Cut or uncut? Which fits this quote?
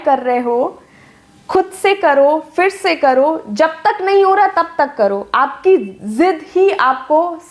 uncut